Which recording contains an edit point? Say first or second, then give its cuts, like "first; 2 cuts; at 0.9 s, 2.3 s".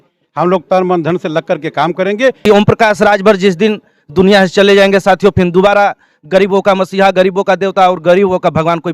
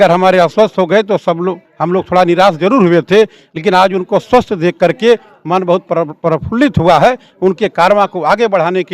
first; 1 cut; at 2.5 s